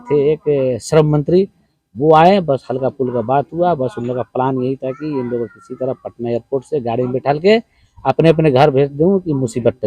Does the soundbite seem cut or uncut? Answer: uncut